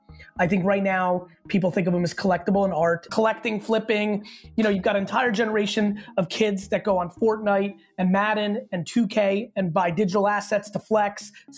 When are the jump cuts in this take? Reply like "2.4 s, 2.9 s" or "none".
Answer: none